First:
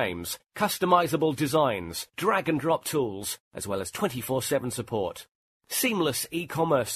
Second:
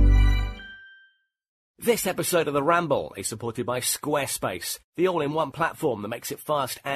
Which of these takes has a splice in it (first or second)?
second